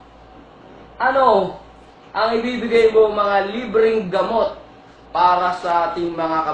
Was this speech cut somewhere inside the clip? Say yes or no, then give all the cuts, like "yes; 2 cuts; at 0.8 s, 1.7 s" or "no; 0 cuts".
no; 0 cuts